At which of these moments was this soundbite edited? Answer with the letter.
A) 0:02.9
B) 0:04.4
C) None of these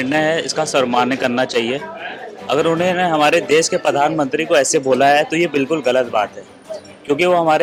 C